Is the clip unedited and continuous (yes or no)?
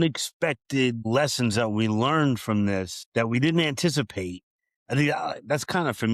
no